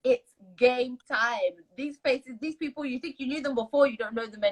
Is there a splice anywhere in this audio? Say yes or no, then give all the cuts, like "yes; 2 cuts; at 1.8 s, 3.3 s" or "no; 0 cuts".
no; 0 cuts